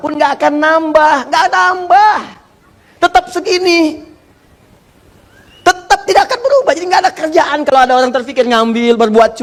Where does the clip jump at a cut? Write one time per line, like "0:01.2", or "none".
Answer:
none